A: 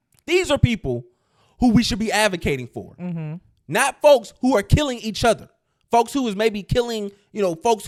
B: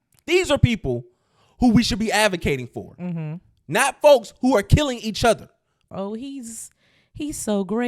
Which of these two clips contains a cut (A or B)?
B